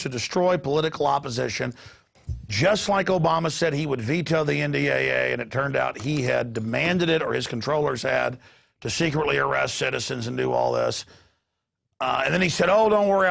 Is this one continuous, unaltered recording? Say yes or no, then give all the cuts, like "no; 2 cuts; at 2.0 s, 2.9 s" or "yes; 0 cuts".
no; 1 cut; at 9.7 s